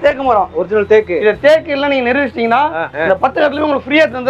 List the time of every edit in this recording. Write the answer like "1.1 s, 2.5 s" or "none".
3.0 s